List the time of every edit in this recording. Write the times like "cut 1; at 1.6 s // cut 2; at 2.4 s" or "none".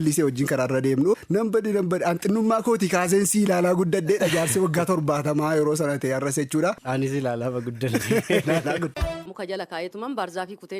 cut 1; at 1.2 s // cut 2; at 9.1 s